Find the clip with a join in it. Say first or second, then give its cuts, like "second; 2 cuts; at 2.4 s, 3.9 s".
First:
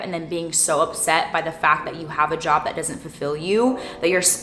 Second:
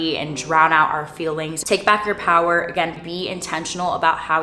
second; 1 cut; at 1.7 s